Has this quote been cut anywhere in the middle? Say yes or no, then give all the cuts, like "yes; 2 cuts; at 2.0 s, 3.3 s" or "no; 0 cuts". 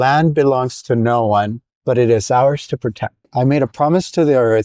yes; 2 cuts; at 1.6 s, 3.2 s